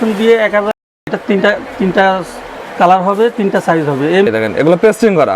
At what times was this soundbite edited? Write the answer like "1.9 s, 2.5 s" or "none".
1.1 s, 4.3 s